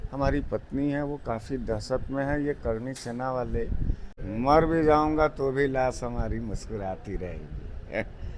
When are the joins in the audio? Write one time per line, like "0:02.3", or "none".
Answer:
0:04.1